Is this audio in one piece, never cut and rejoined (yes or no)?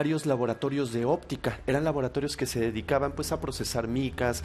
yes